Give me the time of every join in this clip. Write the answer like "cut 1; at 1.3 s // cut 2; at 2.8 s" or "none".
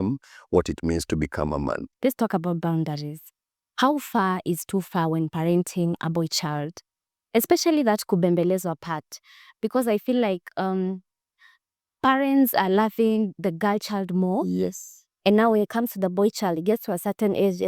cut 1; at 1.9 s